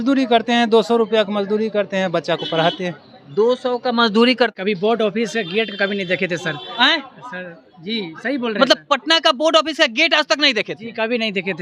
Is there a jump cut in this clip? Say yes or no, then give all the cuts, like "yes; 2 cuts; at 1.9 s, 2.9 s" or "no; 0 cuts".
yes; 1 cut; at 4.5 s